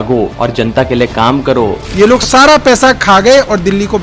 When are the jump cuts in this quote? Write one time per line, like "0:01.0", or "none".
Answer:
0:01.8